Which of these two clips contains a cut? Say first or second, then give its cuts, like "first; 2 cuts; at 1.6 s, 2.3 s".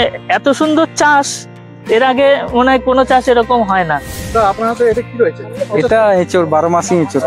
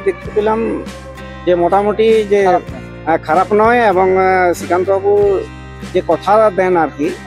first; 1 cut; at 4.0 s